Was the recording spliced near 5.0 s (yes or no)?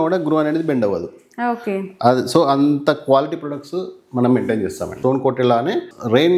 yes